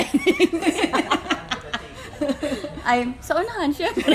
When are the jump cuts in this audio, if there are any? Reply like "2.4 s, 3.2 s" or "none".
none